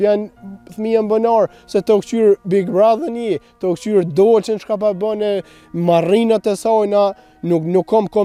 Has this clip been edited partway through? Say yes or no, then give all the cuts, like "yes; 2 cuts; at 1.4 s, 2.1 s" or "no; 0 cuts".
no; 0 cuts